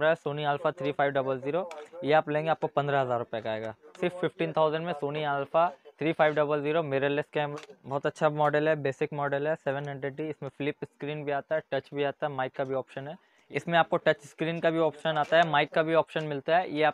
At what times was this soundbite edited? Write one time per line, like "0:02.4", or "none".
0:07.5
0:13.3